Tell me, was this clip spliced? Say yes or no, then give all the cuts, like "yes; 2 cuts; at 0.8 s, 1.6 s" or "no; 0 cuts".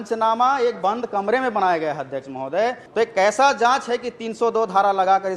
yes; 1 cut; at 2.8 s